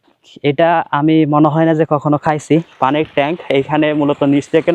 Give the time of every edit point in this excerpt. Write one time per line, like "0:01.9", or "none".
0:02.7